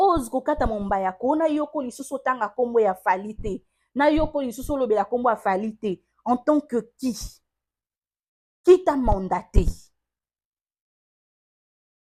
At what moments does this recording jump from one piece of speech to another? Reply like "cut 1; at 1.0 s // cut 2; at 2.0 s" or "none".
none